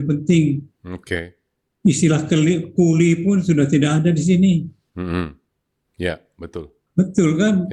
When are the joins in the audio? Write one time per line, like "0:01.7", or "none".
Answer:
0:06.8